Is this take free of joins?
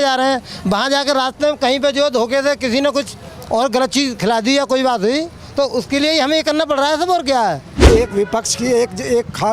no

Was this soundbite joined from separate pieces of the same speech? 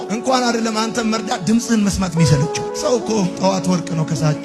no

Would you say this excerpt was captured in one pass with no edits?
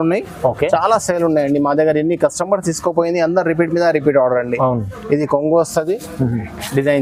yes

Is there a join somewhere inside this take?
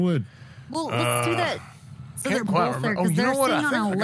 no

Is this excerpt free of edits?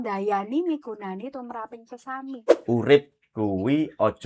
no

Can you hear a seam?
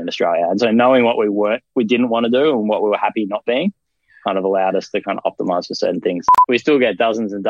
yes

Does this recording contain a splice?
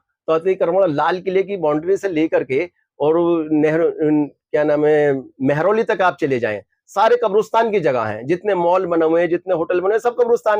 no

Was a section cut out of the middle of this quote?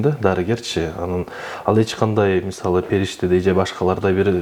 no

